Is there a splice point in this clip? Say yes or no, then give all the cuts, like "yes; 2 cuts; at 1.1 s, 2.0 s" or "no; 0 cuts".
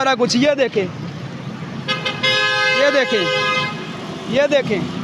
no; 0 cuts